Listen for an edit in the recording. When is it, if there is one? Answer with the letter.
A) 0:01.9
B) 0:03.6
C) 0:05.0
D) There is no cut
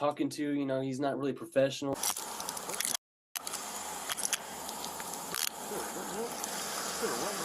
A